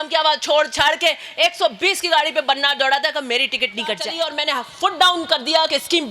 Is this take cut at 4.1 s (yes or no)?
yes